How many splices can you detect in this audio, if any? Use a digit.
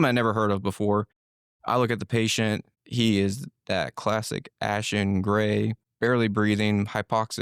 1